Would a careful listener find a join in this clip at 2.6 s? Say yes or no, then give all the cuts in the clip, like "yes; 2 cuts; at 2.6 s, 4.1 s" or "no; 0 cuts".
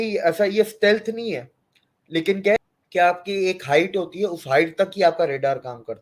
yes; 1 cut; at 2.6 s